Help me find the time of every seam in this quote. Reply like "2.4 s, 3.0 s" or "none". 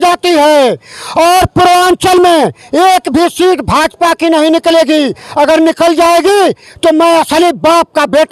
none